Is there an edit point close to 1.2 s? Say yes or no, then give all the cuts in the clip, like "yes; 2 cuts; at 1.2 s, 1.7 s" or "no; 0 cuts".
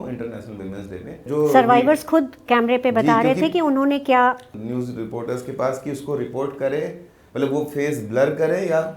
yes; 2 cuts; at 1.2 s, 4.5 s